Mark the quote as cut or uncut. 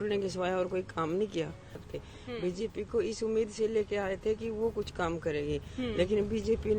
cut